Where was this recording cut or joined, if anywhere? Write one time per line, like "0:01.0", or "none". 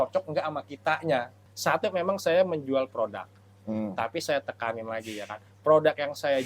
0:01.4